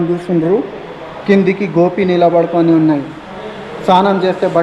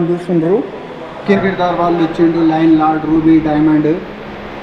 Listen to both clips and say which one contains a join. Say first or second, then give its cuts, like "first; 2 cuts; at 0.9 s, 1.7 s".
second; 1 cut; at 1.4 s